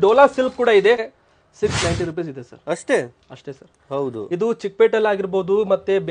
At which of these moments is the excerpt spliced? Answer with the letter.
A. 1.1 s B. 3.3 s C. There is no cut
A